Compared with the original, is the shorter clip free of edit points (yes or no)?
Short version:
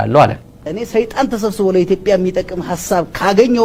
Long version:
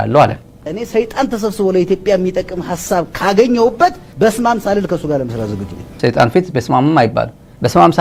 yes